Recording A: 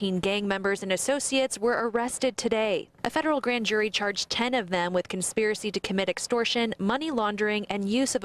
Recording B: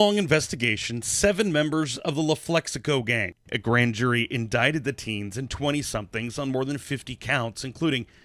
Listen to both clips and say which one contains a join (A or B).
B